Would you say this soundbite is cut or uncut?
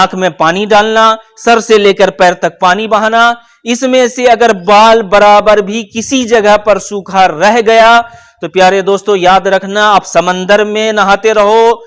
uncut